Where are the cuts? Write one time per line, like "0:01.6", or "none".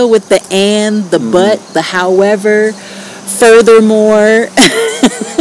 none